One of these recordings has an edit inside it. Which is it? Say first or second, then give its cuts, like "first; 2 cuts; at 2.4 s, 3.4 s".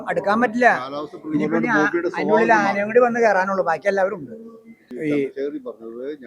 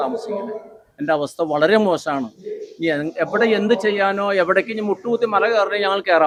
first; 1 cut; at 4.9 s